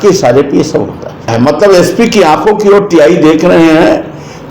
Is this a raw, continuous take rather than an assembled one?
no; 1 cut; at 1.3 s

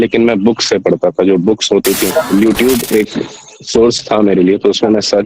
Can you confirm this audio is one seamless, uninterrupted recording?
no; 1 cut; at 2.3 s

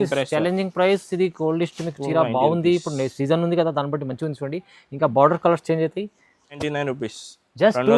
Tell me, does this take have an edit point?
yes; 1 cut; at 6.6 s

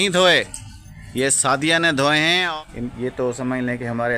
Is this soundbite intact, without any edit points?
no; 1 cut; at 2.4 s

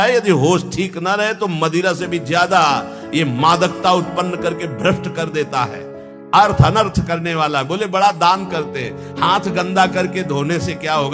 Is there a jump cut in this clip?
no; 0 cuts

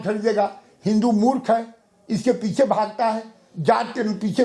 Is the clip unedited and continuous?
yes; 0 cuts

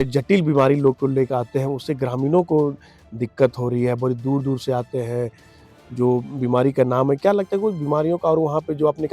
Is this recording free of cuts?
yes; 0 cuts

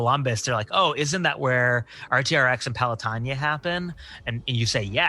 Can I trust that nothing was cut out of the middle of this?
yes; 0 cuts

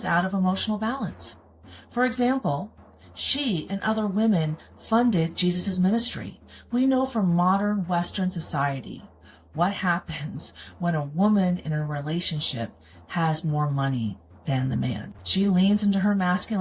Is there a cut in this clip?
no; 0 cuts

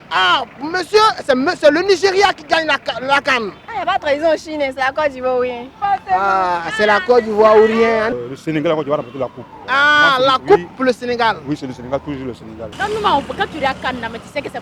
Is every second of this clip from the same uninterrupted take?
no; 4 cuts; at 3.6 s, 8.2 s, 9.5 s, 12.6 s

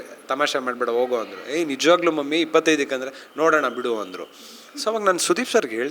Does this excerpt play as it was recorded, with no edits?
yes; 0 cuts

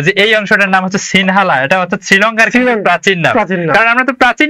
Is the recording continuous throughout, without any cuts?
yes; 0 cuts

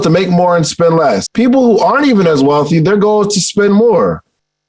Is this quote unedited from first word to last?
no; 1 cut; at 1.3 s

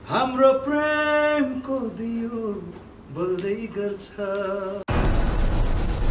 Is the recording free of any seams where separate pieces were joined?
no; 1 cut; at 4.8 s

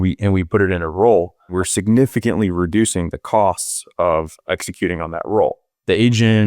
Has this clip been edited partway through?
yes; 1 cut; at 1.5 s

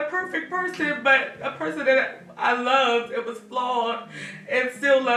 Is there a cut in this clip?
no; 0 cuts

